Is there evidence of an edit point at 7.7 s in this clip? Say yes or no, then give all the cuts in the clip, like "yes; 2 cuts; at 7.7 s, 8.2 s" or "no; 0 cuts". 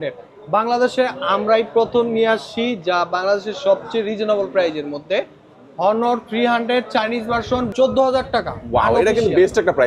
yes; 1 cut; at 7.7 s